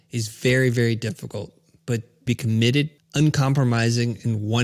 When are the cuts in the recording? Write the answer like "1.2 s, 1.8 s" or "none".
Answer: 2.2 s, 3.0 s